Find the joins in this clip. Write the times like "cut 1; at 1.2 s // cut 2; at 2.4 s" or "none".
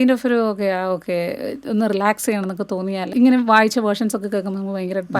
cut 1; at 3.0 s